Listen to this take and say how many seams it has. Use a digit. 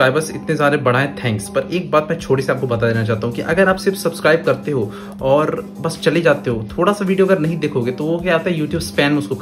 0